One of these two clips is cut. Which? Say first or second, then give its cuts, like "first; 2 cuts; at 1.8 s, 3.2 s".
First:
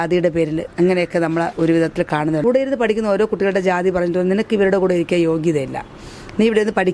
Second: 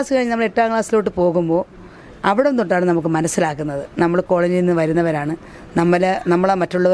first; 1 cut; at 2.4 s